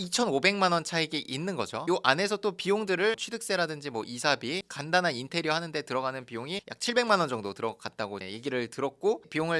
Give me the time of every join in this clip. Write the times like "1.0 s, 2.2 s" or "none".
none